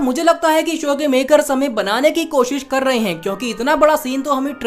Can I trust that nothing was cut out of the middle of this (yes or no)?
yes